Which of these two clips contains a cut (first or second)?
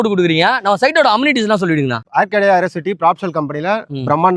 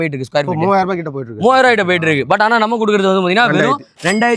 first